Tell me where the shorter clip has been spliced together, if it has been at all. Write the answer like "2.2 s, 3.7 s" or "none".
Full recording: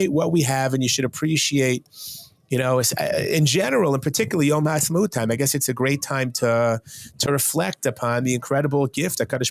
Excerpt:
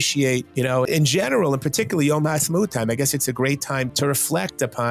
0.8 s, 3.9 s